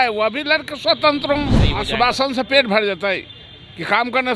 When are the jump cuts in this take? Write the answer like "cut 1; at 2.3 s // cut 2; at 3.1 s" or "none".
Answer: cut 1; at 1.7 s